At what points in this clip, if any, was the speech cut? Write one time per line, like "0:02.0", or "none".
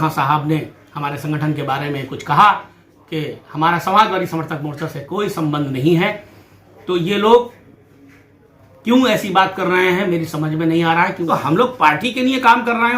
0:11.2

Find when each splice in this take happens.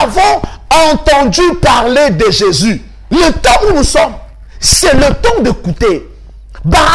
0:02.9

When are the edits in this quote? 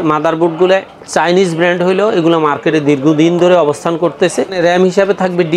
0:04.6

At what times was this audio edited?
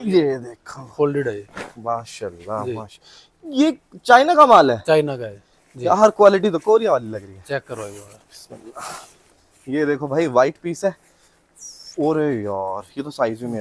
none

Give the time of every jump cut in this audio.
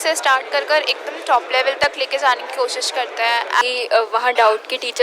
0:03.6

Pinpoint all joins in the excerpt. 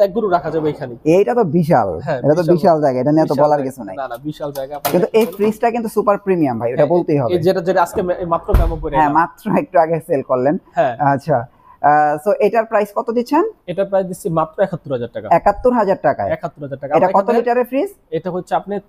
none

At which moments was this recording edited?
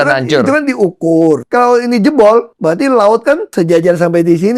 0:01.4
0:02.5
0:03.5

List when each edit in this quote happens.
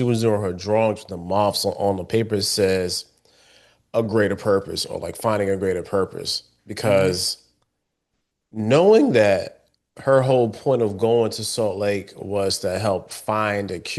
none

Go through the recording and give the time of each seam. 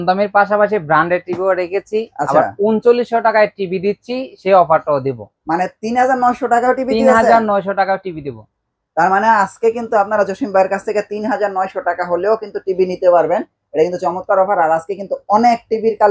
none

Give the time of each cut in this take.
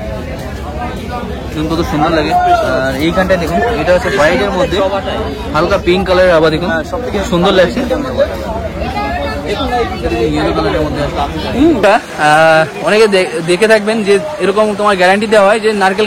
0:11.8

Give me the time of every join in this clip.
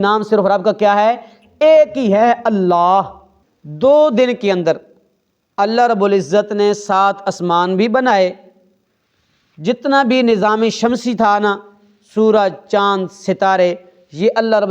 0:03.1

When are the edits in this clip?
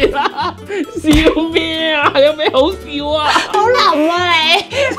none

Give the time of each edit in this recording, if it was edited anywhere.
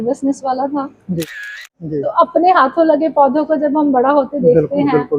0:01.6

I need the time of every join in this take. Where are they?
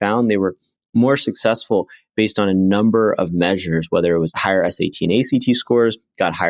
0:04.4

